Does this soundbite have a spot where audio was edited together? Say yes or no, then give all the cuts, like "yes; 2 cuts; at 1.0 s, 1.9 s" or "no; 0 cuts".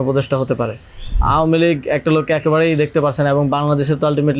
yes; 1 cut; at 1.2 s